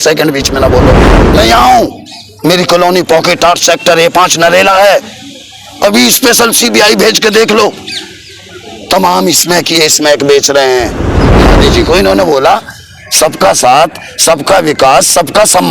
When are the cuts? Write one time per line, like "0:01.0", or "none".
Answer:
0:01.1
0:11.5